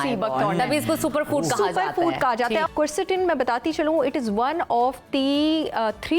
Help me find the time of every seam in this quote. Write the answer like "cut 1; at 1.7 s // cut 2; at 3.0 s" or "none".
cut 1; at 2.7 s